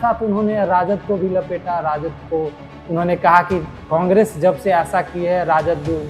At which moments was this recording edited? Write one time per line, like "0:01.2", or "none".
none